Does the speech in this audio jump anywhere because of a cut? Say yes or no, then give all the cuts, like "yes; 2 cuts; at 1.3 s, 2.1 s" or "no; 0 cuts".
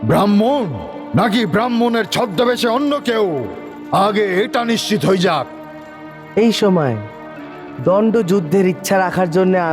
no; 0 cuts